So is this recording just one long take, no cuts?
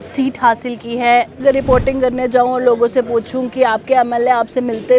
no; 1 cut; at 1.4 s

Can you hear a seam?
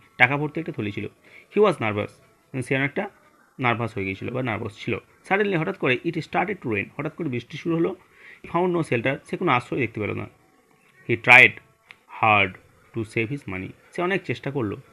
yes; 1 cut; at 8.5 s

